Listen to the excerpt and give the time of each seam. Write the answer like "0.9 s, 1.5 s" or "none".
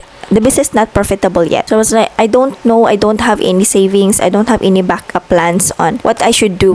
1.6 s, 6.0 s